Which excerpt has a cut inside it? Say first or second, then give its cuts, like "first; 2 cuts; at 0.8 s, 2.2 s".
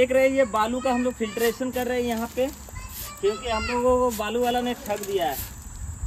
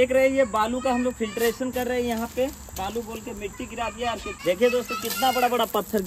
second; 2 cuts; at 2.8 s, 4.3 s